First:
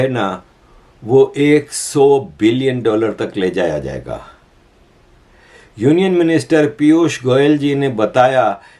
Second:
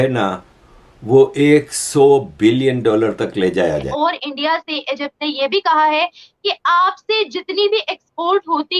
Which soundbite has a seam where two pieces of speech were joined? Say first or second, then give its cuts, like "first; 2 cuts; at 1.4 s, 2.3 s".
second; 1 cut; at 4.0 s